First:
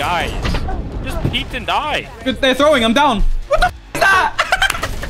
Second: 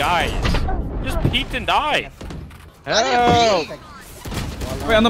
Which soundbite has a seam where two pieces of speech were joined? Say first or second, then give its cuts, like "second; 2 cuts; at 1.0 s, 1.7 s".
first; 1 cut; at 2.1 s